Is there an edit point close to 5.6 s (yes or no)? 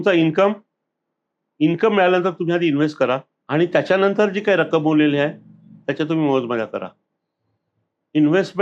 no